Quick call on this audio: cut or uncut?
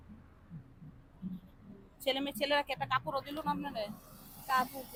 uncut